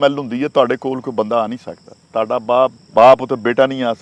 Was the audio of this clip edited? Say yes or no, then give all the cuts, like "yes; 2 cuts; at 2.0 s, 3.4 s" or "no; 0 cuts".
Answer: yes; 1 cut; at 2.8 s